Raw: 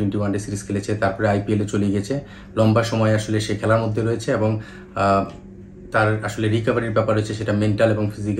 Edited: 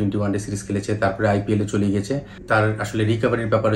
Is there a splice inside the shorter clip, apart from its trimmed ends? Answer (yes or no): yes